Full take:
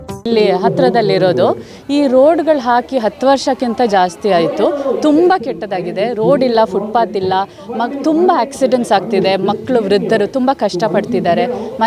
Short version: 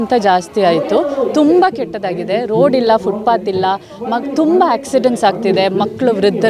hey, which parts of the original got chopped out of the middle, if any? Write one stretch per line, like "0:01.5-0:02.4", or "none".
none